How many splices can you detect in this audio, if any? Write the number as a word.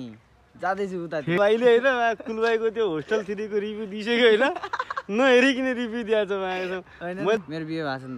two